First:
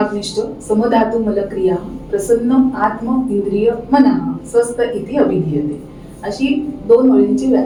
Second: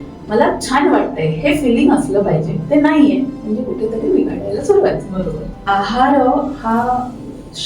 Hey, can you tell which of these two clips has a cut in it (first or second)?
second